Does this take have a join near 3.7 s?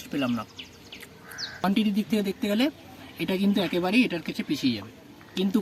no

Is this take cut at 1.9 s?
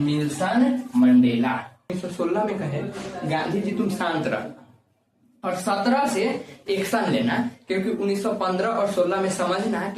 yes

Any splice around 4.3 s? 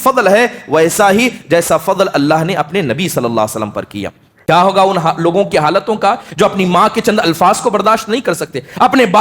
yes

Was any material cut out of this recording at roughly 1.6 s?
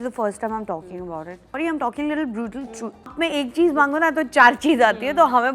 yes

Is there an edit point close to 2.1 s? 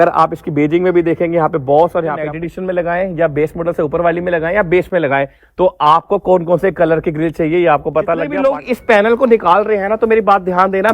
yes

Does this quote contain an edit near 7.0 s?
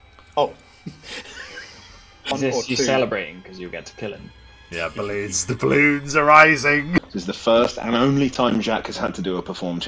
yes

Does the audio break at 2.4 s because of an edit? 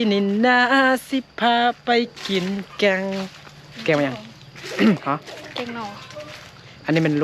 no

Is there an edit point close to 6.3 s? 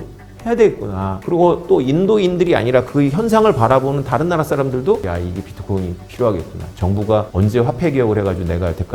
no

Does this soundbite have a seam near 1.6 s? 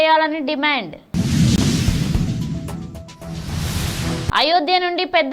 yes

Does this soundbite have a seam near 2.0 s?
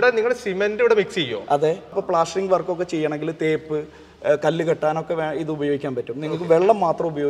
yes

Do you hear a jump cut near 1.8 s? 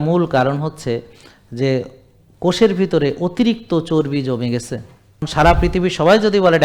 no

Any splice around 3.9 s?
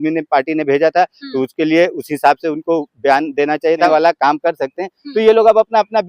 yes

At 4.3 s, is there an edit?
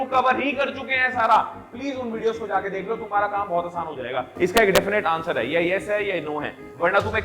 yes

